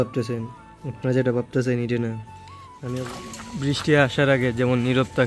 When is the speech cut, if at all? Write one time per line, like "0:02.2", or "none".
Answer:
0:02.9